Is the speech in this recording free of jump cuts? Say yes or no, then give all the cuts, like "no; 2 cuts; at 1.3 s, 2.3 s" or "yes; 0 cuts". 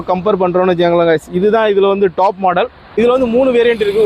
yes; 0 cuts